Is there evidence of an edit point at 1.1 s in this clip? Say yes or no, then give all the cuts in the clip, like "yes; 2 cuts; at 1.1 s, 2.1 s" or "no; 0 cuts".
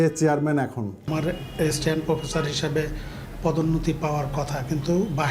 yes; 1 cut; at 1.1 s